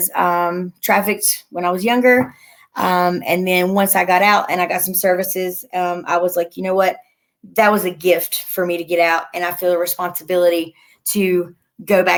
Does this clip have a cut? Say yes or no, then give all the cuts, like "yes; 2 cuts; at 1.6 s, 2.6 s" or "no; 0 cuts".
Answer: no; 0 cuts